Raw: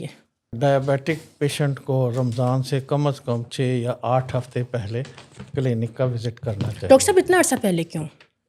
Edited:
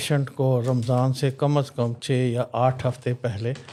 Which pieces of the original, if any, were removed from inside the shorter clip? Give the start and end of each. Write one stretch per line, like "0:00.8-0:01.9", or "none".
none